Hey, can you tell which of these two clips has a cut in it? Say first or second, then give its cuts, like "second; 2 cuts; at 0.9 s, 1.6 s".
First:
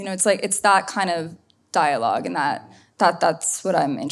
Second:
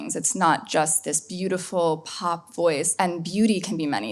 second; 1 cut; at 2.9 s